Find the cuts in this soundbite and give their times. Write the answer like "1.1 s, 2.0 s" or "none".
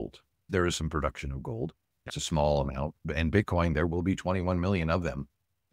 2.1 s